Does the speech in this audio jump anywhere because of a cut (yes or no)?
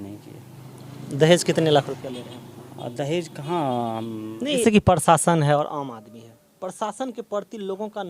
yes